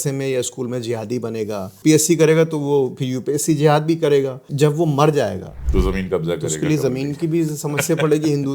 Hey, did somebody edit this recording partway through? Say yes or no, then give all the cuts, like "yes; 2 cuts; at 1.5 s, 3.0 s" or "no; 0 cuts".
yes; 3 cuts; at 1.7 s, 4.4 s, 5.5 s